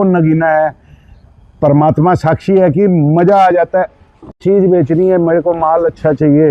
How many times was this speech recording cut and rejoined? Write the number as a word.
one